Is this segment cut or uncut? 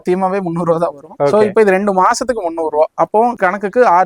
uncut